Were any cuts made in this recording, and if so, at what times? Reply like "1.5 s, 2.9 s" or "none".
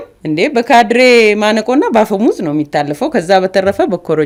none